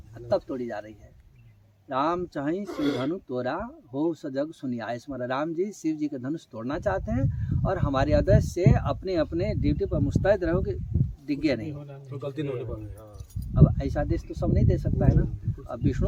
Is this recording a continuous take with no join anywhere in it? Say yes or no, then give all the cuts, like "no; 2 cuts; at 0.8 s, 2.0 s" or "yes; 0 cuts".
yes; 0 cuts